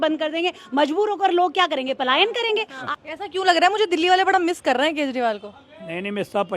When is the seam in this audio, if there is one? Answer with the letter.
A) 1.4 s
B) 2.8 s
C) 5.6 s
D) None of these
B